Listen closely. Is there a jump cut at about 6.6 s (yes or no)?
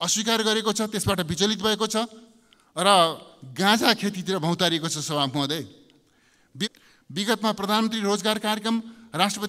yes